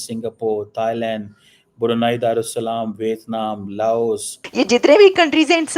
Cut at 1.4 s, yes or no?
no